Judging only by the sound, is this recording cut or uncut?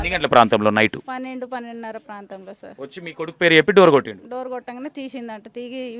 cut